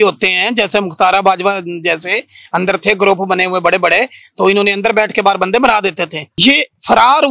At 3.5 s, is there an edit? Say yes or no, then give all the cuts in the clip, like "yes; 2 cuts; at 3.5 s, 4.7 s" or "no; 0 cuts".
no; 1 cut; at 6.4 s